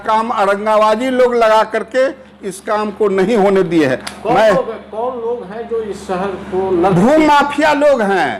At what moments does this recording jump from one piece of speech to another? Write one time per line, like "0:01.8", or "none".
none